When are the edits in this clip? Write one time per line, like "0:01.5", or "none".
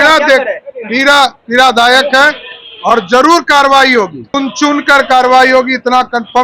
0:04.4